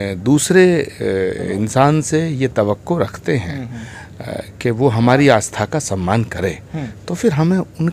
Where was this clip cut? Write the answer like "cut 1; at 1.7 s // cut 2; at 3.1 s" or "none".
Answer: none